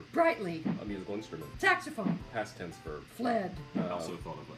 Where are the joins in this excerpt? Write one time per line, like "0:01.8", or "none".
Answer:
0:01.8